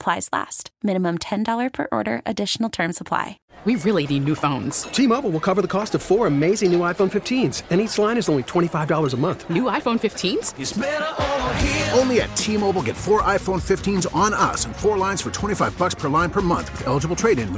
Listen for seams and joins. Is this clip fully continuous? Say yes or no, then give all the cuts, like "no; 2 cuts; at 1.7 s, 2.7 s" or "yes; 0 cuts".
no; 1 cut; at 3.4 s